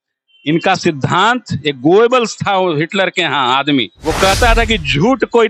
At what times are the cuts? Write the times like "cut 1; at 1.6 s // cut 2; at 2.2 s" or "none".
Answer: cut 1; at 3.9 s